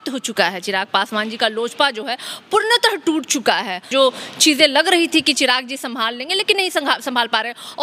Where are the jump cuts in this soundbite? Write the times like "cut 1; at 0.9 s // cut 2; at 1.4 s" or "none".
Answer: cut 1; at 3.9 s

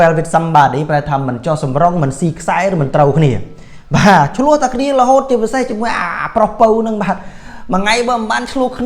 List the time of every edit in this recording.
none

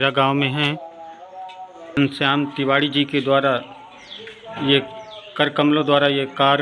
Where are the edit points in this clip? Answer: cut 1; at 2.0 s

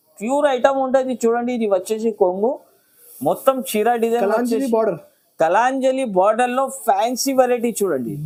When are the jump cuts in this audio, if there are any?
none

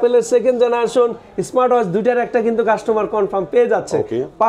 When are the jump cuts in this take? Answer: none

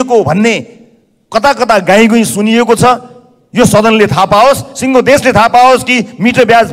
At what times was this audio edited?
none

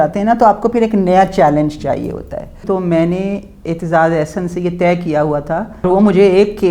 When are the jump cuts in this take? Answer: cut 1; at 2.6 s // cut 2; at 5.8 s

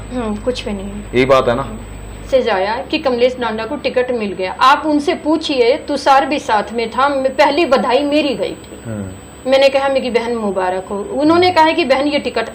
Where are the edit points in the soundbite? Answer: cut 1; at 2.2 s

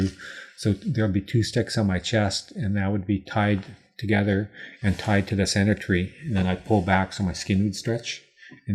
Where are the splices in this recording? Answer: none

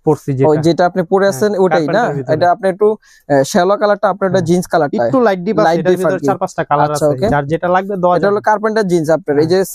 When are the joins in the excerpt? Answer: none

